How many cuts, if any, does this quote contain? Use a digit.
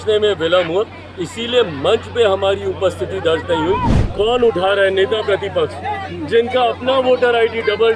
1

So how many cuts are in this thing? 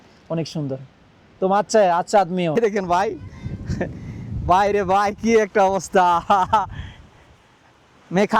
1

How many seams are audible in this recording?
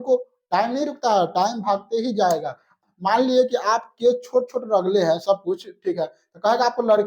1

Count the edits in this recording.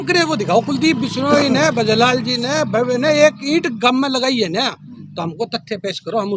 0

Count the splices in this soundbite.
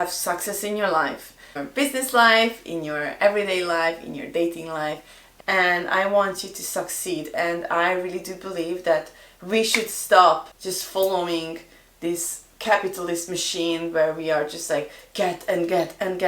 2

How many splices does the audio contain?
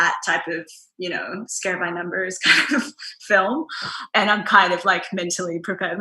1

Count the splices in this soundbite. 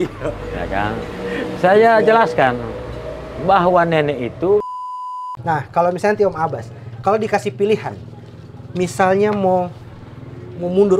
1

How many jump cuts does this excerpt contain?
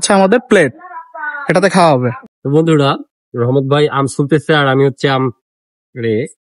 1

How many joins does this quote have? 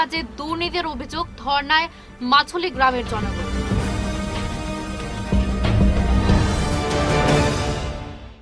0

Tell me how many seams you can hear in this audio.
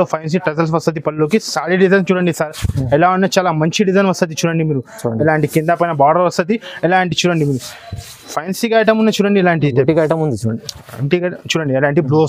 0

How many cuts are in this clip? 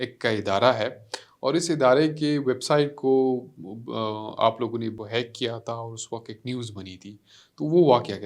1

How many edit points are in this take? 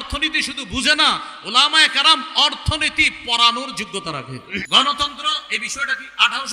1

